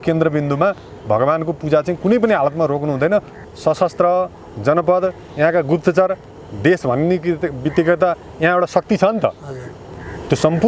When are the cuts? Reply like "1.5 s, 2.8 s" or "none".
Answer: 3.4 s